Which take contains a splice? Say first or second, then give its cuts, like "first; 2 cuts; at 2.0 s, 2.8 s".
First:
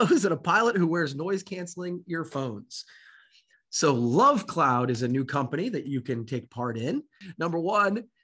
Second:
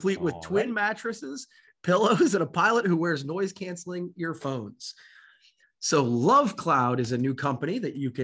first; 1 cut; at 7.2 s